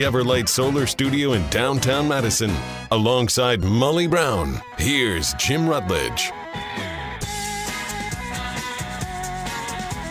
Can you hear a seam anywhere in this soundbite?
no; 0 cuts

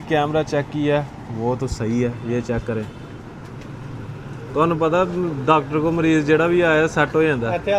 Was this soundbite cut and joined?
no; 0 cuts

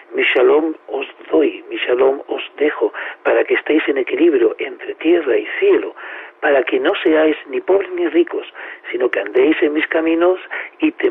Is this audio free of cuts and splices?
yes; 0 cuts

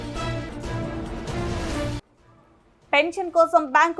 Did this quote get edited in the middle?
yes; 1 cut; at 1.9 s

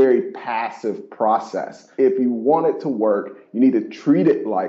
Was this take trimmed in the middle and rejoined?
yes; 1 cut; at 1.9 s

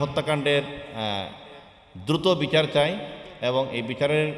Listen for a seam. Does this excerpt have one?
no; 0 cuts

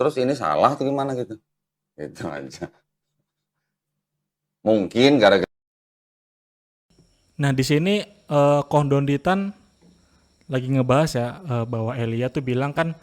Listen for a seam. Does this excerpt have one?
no; 0 cuts

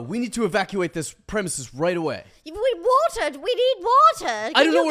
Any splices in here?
no; 0 cuts

